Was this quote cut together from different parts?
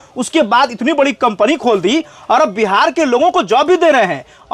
no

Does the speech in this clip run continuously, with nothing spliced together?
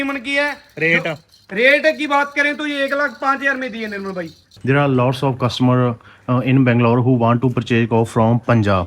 no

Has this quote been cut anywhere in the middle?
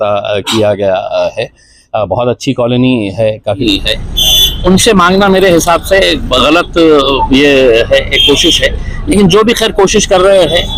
yes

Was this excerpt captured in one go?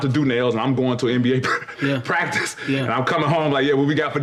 yes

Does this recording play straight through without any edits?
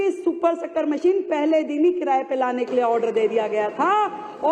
yes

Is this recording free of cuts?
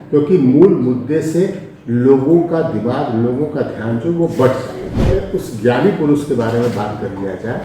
no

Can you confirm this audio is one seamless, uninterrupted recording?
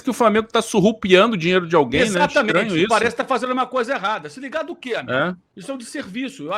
no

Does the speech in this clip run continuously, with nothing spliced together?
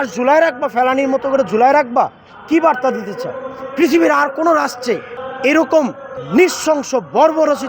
yes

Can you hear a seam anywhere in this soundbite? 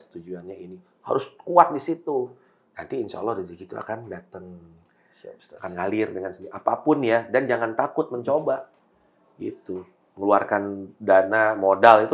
no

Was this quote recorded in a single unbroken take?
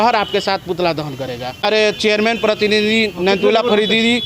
no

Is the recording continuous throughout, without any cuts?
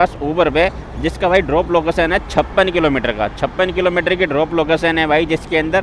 yes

